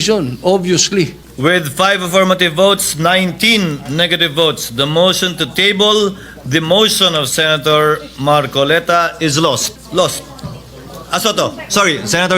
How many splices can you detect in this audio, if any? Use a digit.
2